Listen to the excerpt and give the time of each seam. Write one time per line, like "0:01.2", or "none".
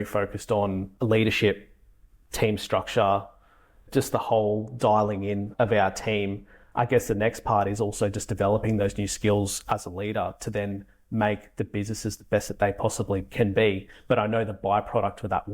0:00.9
0:03.8
0:05.5
0:06.6
0:13.2